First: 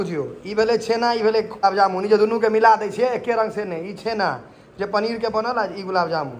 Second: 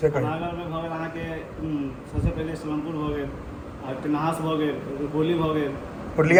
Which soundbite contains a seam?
first; 1 cut; at 1.6 s

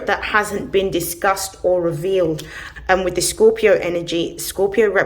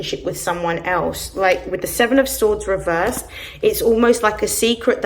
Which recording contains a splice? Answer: first; 1 cut; at 2.6 s

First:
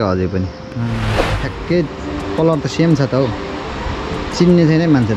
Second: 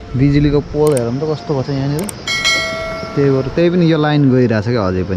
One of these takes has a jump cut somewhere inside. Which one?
first; 1 cut; at 1.4 s

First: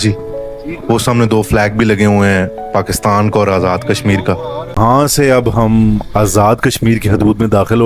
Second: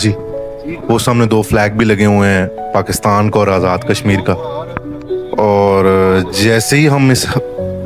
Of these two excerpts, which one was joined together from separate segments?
first; 1 cut; at 4.8 s

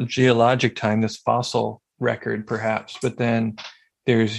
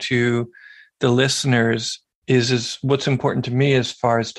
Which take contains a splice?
first; 1 cut; at 1.8 s

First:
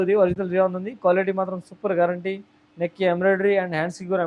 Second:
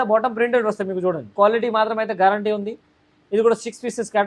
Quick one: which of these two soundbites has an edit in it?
second; 1 cut; at 1.3 s

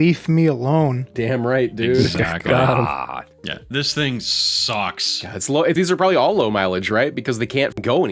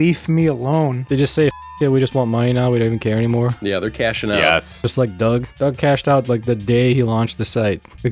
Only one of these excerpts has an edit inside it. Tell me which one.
second; 2 cuts; at 1.0 s, 4.8 s

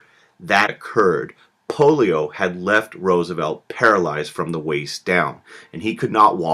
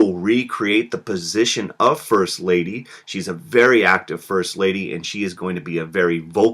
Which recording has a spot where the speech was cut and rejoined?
second; 1 cut; at 3.9 s

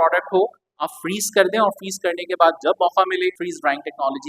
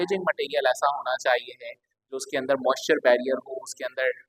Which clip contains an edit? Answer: first; 1 cut; at 3.4 s

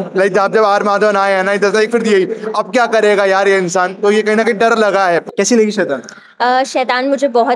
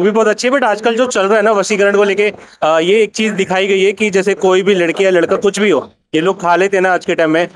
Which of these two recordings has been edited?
first; 1 cut; at 5.2 s

